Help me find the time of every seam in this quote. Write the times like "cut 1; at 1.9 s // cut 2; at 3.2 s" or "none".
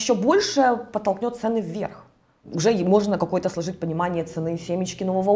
cut 1; at 2.4 s